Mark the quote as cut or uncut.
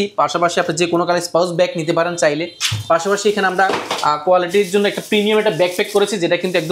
uncut